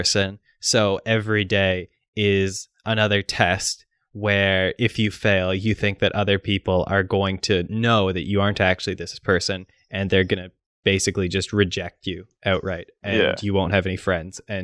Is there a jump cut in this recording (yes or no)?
no